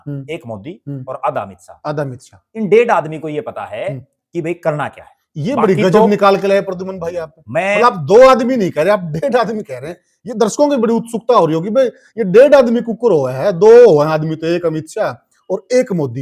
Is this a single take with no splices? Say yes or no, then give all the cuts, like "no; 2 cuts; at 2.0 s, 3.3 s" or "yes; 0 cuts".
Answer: yes; 0 cuts